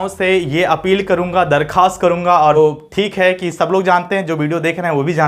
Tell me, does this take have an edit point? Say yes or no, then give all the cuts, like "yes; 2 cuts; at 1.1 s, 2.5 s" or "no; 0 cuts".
yes; 1 cut; at 2.6 s